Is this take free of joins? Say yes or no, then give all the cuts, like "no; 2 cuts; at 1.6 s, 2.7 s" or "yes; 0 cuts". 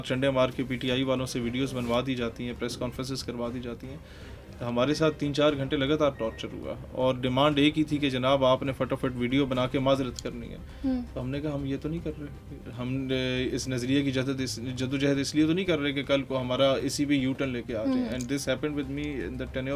yes; 0 cuts